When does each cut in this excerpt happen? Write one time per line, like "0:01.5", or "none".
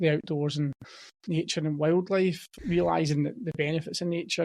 0:02.5